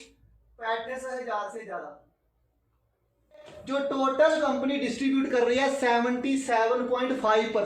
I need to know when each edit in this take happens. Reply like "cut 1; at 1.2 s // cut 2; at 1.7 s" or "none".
cut 1; at 3.5 s